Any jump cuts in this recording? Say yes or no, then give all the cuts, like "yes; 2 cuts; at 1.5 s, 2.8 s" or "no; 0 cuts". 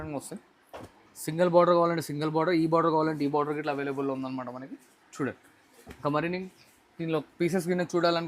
no; 0 cuts